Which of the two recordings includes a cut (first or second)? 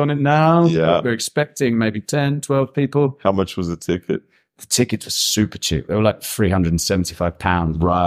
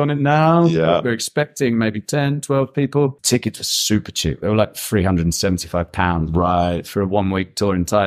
second